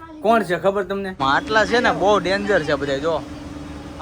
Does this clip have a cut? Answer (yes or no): yes